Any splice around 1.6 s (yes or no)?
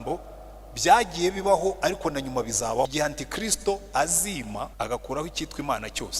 no